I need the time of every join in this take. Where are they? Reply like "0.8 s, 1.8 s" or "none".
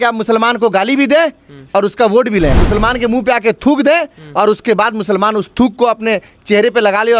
2.5 s